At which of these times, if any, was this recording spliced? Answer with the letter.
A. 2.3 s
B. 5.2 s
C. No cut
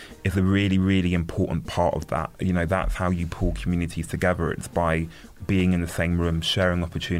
A